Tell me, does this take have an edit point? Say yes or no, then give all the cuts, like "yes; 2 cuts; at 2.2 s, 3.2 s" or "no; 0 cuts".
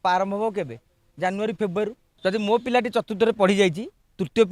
yes; 1 cut; at 2.0 s